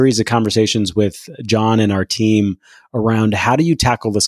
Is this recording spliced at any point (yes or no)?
no